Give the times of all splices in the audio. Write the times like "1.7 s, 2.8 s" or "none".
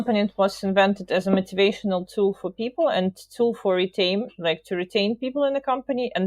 none